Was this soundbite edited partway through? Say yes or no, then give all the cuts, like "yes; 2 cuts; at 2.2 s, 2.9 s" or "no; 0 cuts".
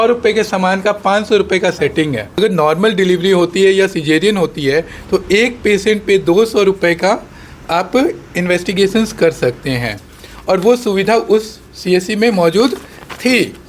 yes; 1 cut; at 2.4 s